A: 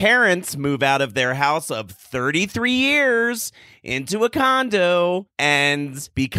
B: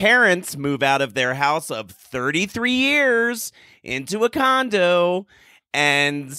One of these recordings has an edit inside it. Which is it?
A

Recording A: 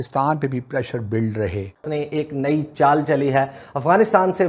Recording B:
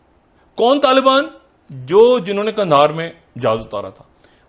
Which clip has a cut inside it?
A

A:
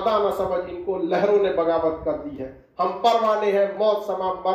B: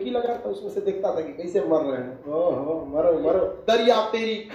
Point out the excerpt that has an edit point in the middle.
B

